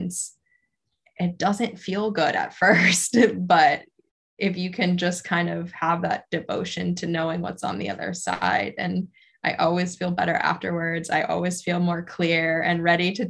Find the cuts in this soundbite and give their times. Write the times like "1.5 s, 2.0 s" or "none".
none